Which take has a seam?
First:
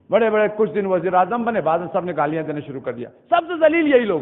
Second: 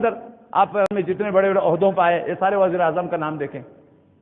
second; 1 cut; at 1.0 s

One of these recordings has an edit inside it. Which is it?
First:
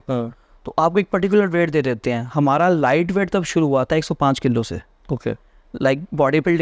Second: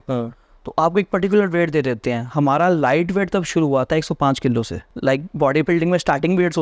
second; 1 cut; at 4.8 s

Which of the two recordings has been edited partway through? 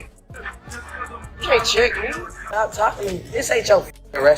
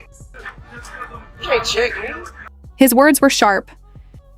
first; 1 cut; at 2.7 s

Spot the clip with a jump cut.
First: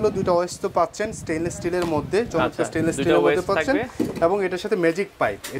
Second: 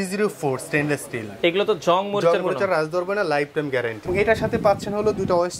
second; 1 cut; at 4.1 s

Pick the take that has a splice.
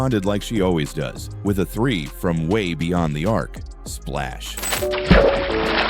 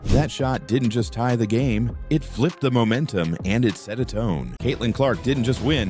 second; 1 cut; at 4.6 s

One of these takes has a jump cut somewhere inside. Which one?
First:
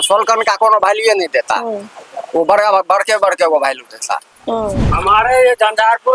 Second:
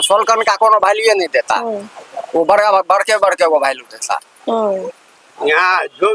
first; 1 cut; at 4.8 s

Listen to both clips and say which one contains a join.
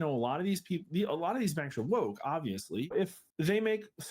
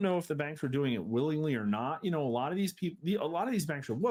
first; 1 cut; at 2.9 s

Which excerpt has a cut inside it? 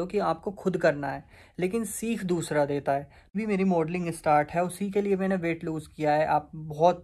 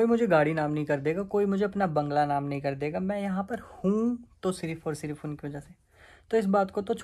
first; 1 cut; at 3.3 s

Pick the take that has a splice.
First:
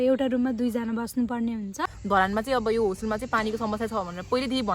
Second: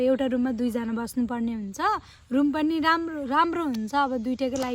first; 1 cut; at 1.7 s

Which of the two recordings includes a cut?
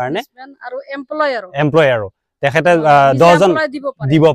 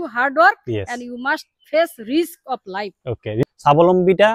second; 1 cut; at 3.4 s

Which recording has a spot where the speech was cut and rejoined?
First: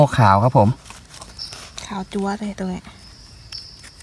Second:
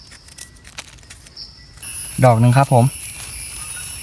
second; 1 cut; at 1.8 s

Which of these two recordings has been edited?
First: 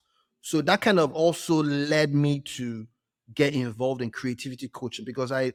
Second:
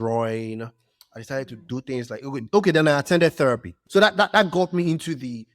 second; 1 cut; at 3.8 s

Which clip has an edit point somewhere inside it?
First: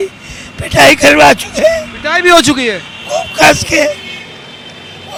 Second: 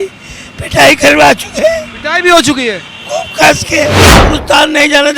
second; 1 cut; at 4.2 s

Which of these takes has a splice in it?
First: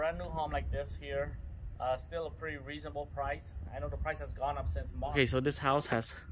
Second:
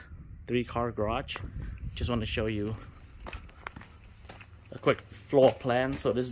first; 1 cut; at 5.1 s

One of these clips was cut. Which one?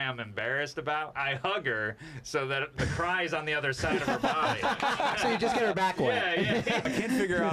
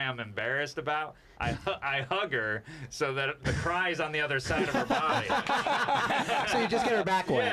first; 3 cuts; at 1.1 s, 5.2 s, 6.8 s

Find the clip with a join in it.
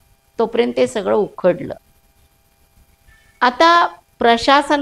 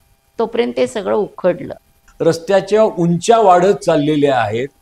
second; 1 cut; at 2.0 s

